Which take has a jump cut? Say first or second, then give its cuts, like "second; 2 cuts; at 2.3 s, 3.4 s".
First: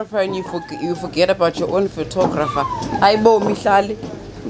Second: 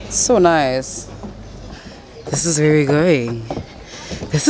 second; 1 cut; at 1.8 s